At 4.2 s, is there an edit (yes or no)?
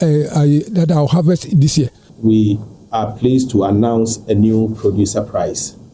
no